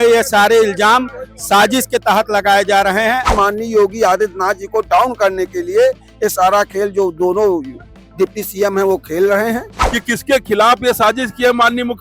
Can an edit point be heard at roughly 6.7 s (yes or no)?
no